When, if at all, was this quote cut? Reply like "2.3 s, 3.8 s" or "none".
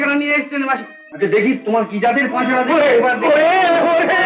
1.0 s

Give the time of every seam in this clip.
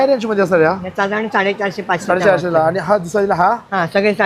none

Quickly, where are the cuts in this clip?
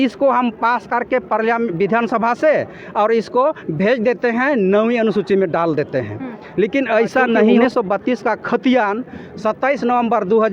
7.6 s

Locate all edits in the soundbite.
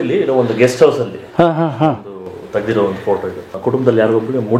3.5 s

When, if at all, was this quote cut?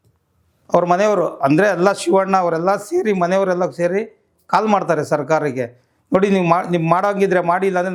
none

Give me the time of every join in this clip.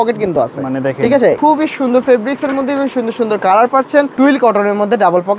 1.4 s, 4.1 s

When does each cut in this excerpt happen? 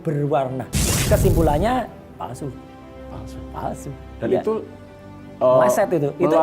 0.9 s

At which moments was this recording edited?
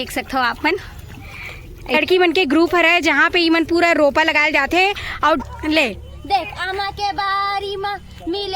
2.0 s, 5.4 s

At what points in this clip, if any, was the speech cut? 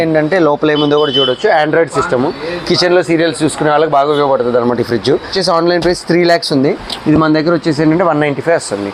5.3 s

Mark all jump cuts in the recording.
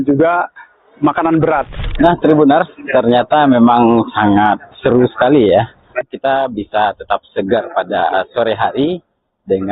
1.7 s

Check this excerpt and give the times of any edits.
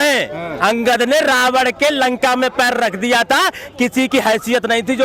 none

